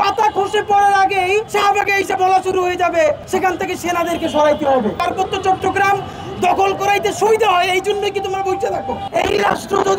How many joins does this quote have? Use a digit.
4